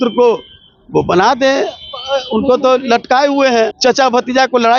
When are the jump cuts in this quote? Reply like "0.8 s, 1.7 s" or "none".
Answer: 3.7 s